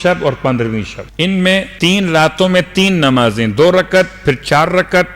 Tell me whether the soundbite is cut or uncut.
cut